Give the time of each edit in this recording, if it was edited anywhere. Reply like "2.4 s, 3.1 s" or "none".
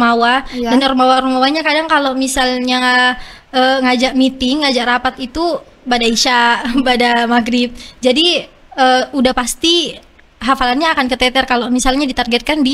none